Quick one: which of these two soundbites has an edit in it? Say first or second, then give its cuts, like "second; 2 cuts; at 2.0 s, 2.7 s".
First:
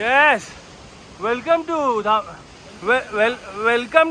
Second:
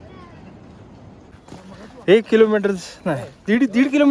second; 1 cut; at 1.3 s